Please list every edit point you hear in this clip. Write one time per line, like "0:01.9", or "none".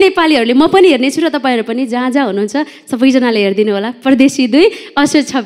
none